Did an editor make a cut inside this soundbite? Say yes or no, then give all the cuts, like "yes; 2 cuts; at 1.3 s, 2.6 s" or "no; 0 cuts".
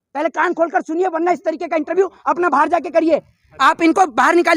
no; 0 cuts